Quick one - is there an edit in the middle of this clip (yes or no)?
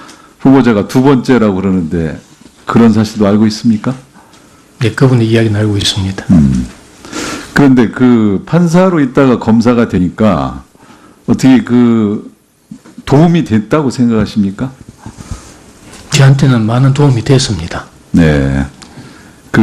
no